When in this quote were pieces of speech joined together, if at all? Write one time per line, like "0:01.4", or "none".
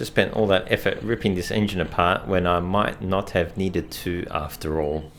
none